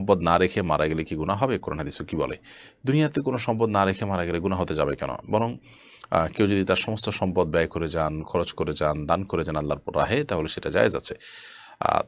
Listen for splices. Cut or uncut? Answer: uncut